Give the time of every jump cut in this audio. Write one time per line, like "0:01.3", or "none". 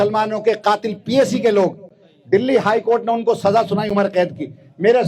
none